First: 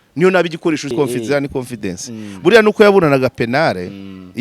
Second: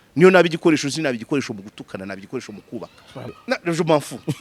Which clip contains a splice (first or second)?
first